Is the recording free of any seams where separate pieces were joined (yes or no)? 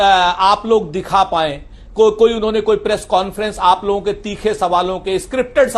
yes